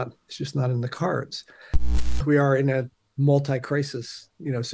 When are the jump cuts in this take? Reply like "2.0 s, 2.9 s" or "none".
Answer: 2.0 s